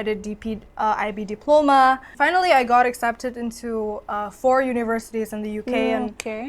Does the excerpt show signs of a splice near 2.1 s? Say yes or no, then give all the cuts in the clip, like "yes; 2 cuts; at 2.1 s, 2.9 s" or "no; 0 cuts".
yes; 1 cut; at 2.1 s